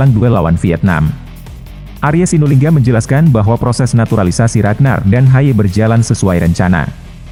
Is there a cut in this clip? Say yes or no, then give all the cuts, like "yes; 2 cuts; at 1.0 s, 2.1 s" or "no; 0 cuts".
no; 0 cuts